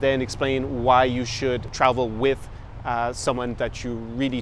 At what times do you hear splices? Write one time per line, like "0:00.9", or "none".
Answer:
0:01.7